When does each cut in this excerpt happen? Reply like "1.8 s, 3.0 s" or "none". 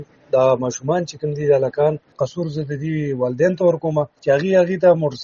2.2 s, 4.1 s